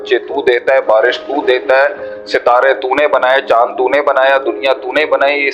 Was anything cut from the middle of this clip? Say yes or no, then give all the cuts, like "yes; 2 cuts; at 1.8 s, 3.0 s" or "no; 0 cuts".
no; 0 cuts